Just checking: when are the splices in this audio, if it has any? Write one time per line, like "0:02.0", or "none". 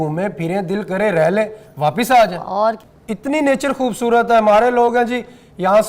0:02.8